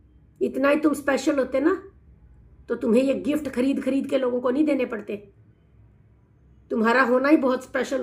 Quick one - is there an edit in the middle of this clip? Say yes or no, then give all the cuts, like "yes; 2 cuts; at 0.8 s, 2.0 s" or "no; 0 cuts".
no; 0 cuts